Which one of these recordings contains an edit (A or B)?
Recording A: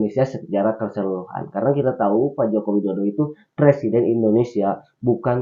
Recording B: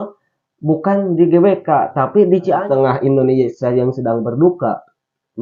B